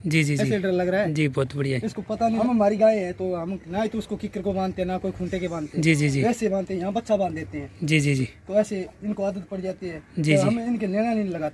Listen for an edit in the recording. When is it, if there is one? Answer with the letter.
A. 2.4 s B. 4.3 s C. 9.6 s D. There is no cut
A